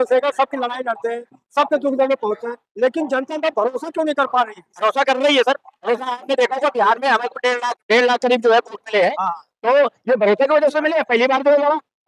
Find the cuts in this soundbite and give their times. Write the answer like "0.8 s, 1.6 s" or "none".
none

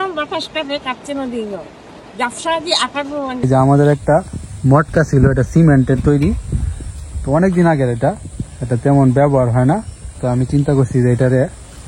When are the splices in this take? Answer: 3.4 s, 10.2 s

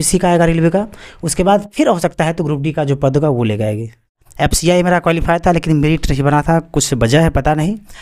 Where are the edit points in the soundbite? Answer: 4.2 s

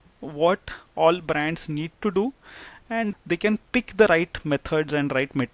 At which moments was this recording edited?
3.1 s

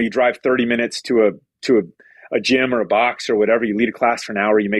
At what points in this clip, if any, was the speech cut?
none

